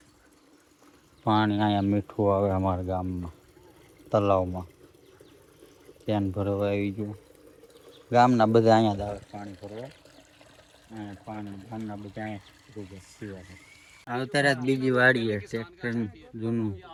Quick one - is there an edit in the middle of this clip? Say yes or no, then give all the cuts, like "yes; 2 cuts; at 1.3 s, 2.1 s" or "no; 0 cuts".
no; 0 cuts